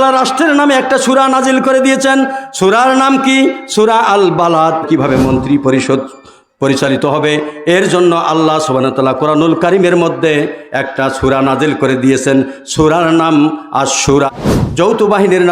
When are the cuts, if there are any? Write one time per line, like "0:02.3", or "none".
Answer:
0:04.9
0:14.3